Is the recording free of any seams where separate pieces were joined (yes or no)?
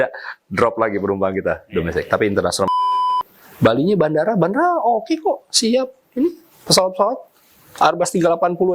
no